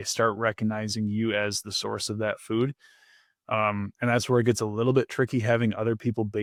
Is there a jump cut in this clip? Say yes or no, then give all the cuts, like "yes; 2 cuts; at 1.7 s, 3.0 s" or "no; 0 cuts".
no; 0 cuts